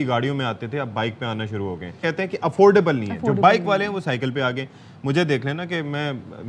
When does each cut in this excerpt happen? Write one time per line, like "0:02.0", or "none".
0:02.0

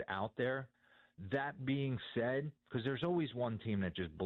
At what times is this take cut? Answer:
none

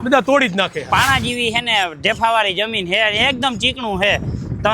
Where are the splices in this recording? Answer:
0:00.9

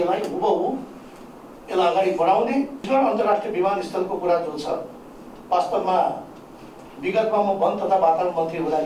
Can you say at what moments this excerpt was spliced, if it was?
0:02.9

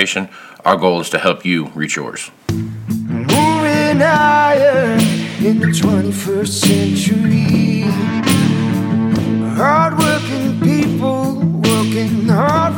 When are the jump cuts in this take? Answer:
0:02.3

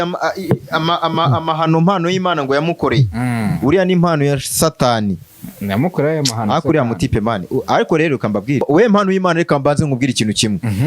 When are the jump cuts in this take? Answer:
0:08.6

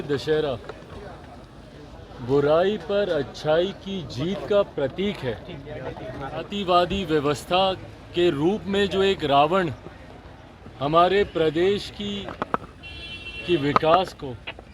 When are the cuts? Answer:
0:06.5

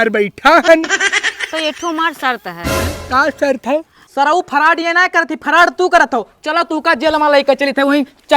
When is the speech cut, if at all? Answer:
0:04.1

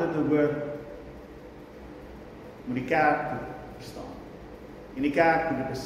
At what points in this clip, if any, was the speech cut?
none

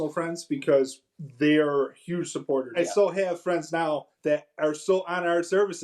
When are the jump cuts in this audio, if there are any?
0:02.7
0:04.1

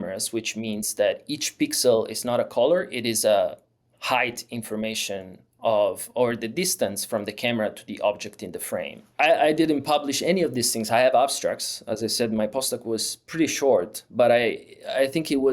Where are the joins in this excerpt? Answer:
0:09.0

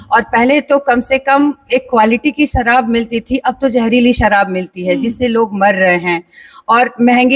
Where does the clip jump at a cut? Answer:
none

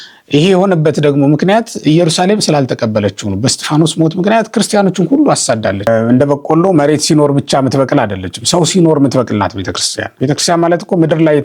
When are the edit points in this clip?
0:05.8
0:10.0

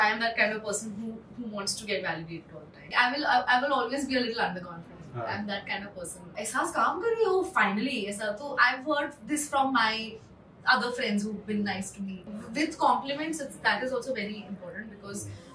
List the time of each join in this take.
0:02.9
0:06.3
0:12.4

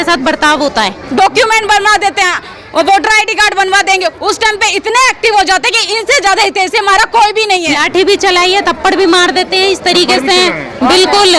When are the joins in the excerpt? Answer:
0:01.0
0:07.7

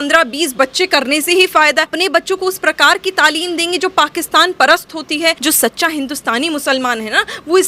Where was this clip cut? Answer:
0:01.9
0:05.4

